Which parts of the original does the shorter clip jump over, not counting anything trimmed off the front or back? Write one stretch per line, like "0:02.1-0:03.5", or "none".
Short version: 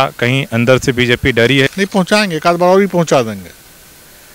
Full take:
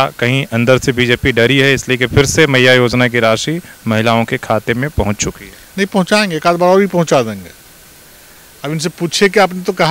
0:01.7-0:05.7